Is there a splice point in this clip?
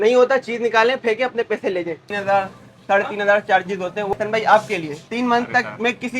yes; 2 cuts; at 2.1 s, 4.1 s

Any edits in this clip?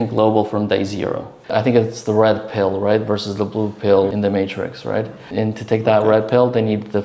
yes; 2 cuts; at 1.3 s, 5.2 s

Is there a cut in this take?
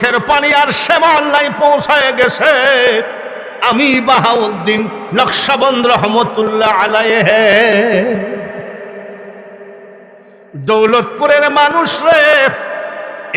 no; 0 cuts

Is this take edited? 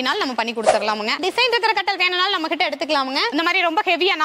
yes; 2 cuts; at 1.2 s, 3.3 s

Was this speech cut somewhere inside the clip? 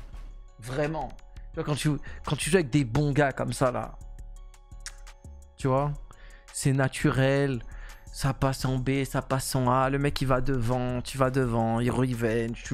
no; 0 cuts

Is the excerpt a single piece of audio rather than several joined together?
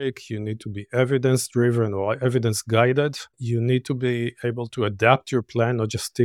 no; 1 cut; at 3.3 s

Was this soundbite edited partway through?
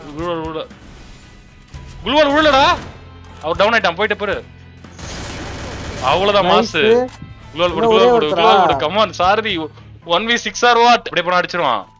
yes; 1 cut; at 11.1 s

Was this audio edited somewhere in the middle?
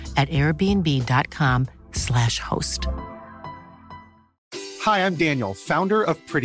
yes; 1 cut; at 4.3 s

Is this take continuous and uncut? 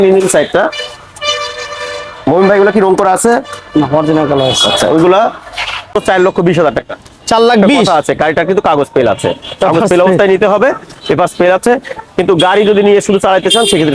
no; 1 cut; at 5.9 s

